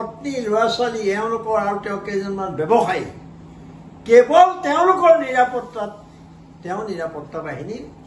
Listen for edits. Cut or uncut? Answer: uncut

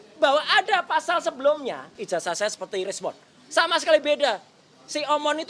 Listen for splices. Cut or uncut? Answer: cut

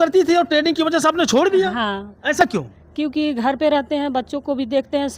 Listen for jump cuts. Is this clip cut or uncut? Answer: uncut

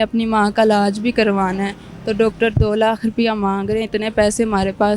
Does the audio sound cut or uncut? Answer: uncut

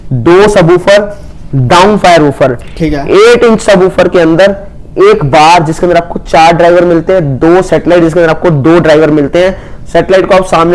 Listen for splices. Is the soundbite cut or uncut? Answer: uncut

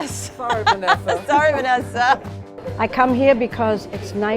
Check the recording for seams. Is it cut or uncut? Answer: cut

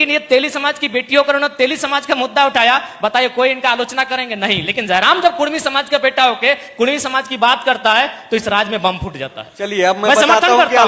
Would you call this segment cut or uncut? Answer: uncut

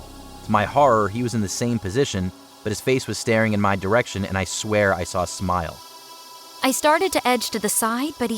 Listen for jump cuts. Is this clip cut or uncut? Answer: cut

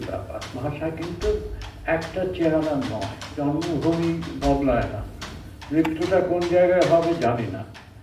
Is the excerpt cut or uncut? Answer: cut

